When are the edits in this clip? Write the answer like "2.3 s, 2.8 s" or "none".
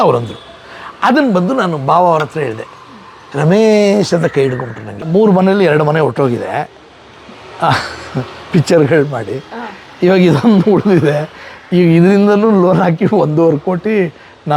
4.9 s